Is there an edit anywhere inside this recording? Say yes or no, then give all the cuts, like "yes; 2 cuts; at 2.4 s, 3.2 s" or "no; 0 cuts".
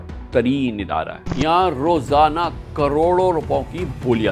yes; 1 cut; at 1.2 s